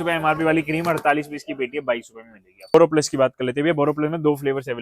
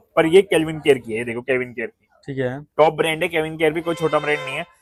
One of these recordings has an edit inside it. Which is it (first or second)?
first